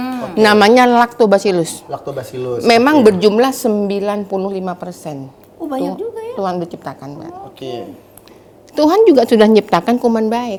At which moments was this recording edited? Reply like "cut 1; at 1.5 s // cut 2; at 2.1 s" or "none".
none